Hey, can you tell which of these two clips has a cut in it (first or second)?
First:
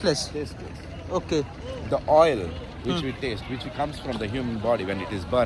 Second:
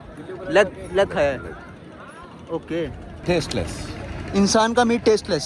second